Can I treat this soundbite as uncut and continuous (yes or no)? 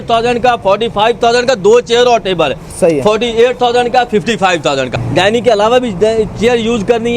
no